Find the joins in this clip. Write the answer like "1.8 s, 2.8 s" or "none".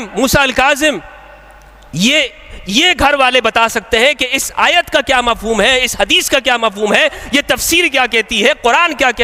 none